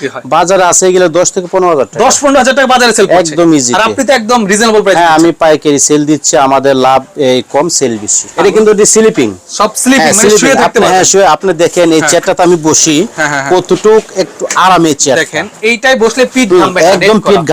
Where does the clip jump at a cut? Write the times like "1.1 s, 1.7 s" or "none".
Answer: 8.3 s

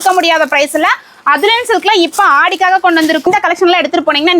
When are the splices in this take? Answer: 3.3 s

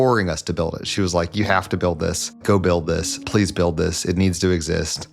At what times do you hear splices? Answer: 2.4 s

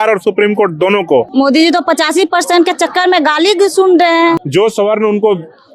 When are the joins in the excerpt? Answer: 1.3 s, 4.4 s

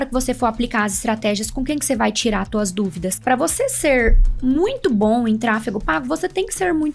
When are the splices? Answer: 3.2 s

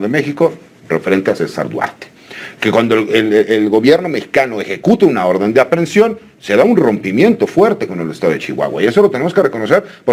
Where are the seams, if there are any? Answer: none

